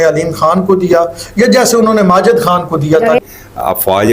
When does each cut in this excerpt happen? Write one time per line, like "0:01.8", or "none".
0:03.2